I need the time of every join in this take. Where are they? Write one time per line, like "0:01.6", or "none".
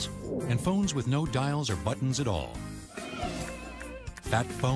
none